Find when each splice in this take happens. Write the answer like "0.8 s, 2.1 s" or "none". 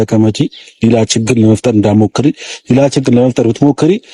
none